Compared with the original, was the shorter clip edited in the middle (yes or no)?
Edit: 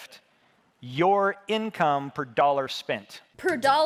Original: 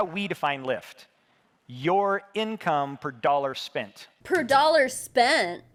no